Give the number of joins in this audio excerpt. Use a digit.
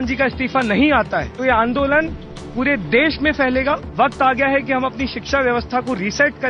2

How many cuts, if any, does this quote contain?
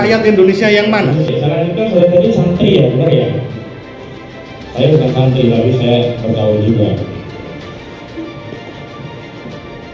1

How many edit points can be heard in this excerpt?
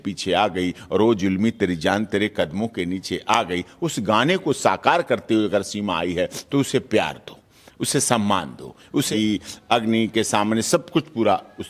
1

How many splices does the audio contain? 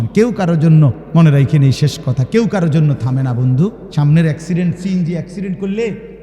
2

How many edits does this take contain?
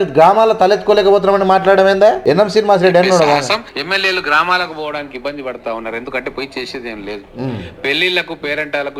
2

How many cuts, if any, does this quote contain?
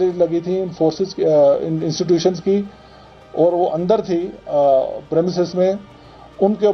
0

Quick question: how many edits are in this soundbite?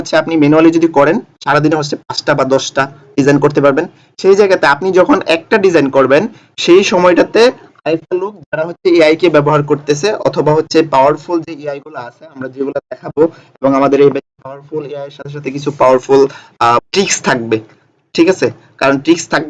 1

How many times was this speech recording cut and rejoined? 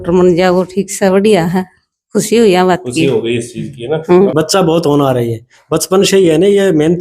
1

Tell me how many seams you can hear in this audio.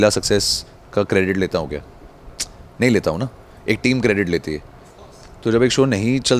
0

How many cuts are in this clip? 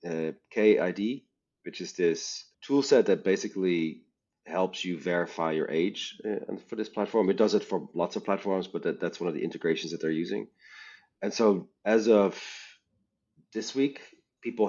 0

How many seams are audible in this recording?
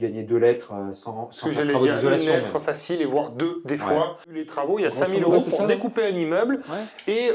1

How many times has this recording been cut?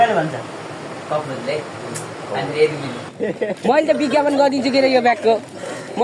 1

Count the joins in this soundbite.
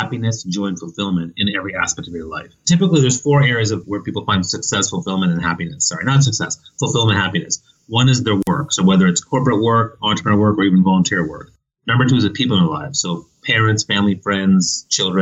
2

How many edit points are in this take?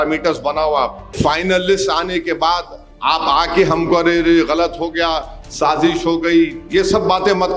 1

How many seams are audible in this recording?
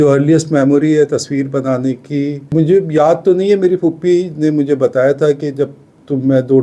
1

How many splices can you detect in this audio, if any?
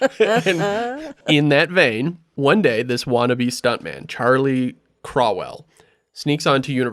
1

